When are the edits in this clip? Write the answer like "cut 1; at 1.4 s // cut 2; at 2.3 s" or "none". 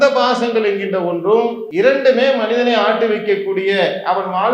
cut 1; at 1.6 s